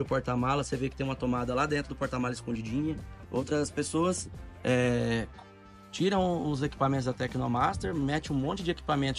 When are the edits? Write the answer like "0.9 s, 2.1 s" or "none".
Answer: 3.1 s